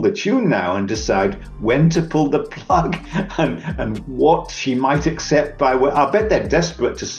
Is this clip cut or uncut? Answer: uncut